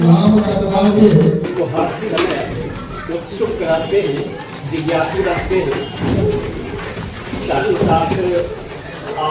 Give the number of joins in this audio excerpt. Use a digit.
1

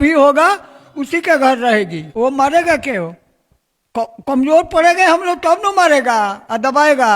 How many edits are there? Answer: 1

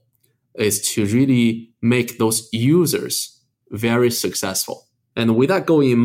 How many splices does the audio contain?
2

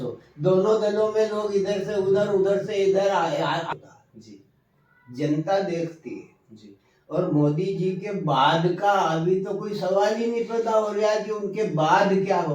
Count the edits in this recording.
1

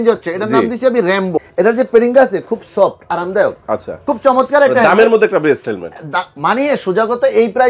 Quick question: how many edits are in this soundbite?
1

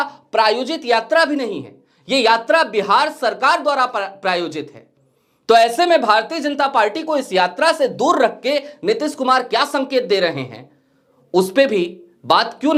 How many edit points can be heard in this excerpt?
0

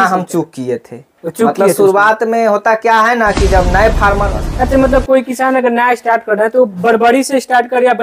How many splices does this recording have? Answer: 1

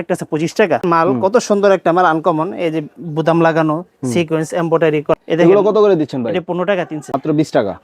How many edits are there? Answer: 3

